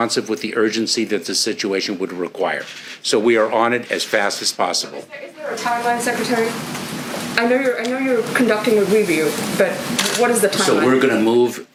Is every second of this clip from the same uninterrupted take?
yes; 0 cuts

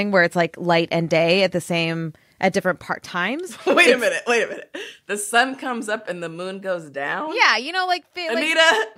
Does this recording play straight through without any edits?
yes; 0 cuts

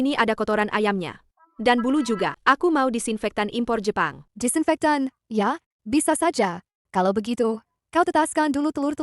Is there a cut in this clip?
yes; 2 cuts; at 2.4 s, 4.2 s

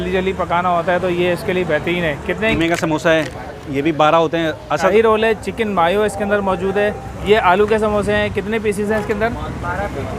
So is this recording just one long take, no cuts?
no; 3 cuts; at 2.5 s, 4.9 s, 7.1 s

